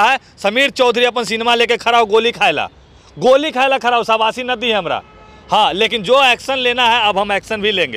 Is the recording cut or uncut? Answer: uncut